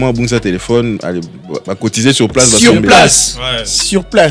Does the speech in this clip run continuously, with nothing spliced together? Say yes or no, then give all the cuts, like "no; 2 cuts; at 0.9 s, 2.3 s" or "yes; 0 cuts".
yes; 0 cuts